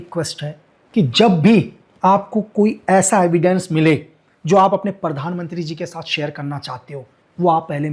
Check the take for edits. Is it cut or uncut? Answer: uncut